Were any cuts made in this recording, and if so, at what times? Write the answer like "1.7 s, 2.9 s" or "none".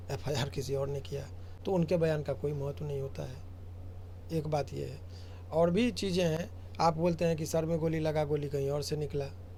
none